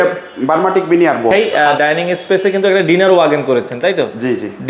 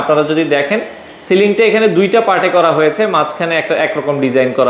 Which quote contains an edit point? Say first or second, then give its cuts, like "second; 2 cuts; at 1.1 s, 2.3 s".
first; 1 cut; at 1.5 s